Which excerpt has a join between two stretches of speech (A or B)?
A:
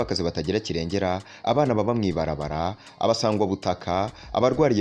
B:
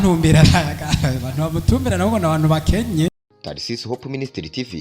B